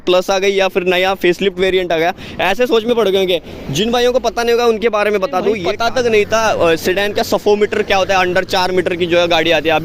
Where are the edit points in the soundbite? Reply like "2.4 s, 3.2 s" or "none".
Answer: 5.7 s

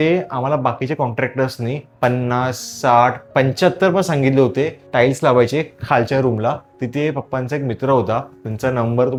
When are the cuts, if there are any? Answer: none

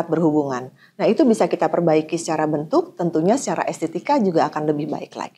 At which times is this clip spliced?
none

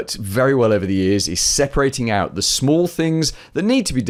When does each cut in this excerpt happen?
none

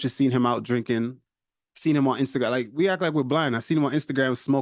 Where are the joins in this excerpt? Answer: 1.2 s

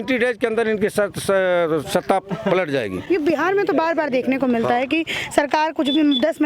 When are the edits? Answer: none

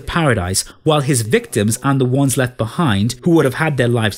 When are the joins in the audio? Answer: 3.1 s

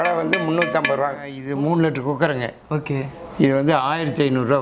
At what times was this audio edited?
1.3 s

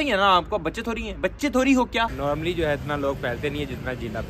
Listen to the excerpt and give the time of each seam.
2.1 s

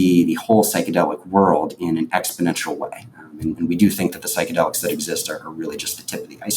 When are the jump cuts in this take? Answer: none

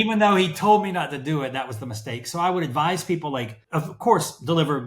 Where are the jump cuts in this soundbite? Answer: 3.6 s

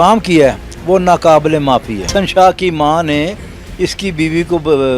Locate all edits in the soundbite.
2.1 s

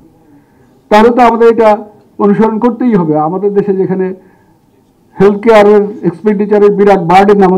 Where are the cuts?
none

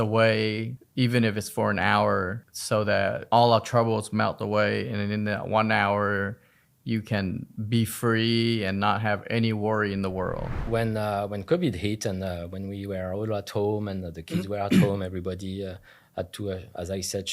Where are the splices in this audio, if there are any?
10.6 s

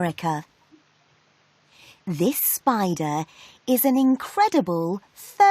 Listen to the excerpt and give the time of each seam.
none

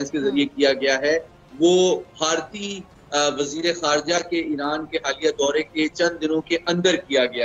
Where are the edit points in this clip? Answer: none

